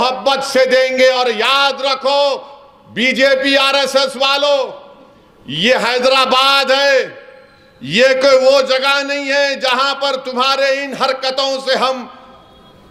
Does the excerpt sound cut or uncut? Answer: uncut